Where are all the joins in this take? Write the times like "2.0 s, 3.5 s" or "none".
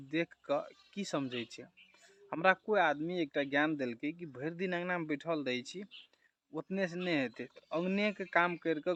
none